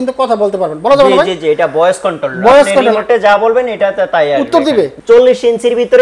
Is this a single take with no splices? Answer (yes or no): no